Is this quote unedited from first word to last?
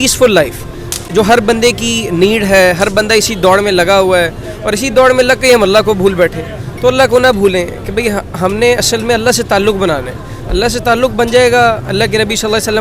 yes; 0 cuts

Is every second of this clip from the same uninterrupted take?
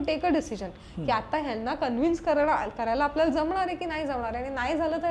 yes; 0 cuts

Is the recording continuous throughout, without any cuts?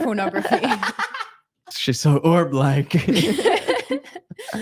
no; 1 cut; at 1.7 s

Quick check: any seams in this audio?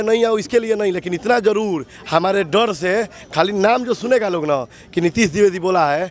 no; 0 cuts

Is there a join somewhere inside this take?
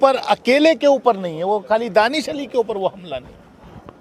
no; 0 cuts

